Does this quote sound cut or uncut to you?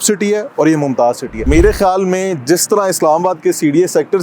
cut